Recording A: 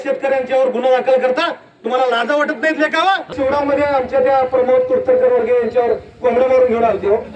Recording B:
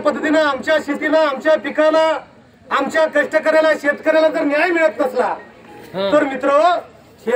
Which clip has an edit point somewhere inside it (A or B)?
A